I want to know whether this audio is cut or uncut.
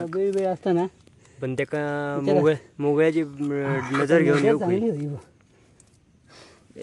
uncut